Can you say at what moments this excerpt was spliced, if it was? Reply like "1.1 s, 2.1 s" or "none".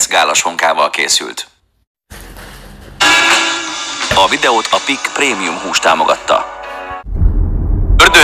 7.1 s